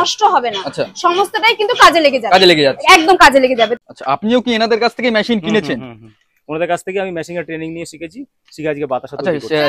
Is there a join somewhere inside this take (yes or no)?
yes